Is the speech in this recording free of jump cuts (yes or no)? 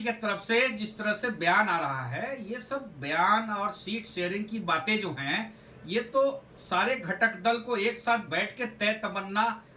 yes